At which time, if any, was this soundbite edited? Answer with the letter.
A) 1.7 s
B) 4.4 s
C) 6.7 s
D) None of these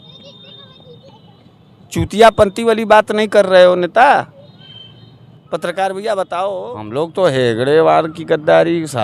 C